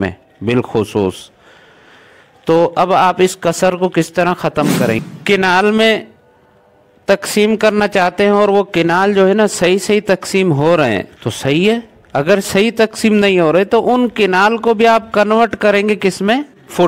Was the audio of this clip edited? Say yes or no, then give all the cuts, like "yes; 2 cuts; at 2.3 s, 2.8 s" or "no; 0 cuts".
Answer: yes; 1 cut; at 5.0 s